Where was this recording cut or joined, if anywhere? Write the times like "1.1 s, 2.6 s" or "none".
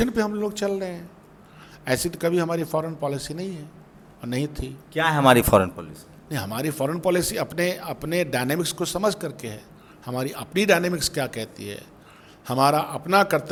none